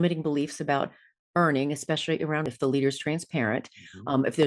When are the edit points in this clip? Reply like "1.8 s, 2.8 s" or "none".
2.5 s